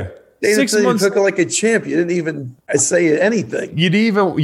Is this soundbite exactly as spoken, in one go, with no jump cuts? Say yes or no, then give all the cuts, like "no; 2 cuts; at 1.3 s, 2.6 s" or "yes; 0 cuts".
no; 1 cut; at 2.7 s